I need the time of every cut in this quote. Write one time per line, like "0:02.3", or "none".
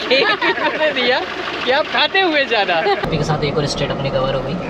0:03.0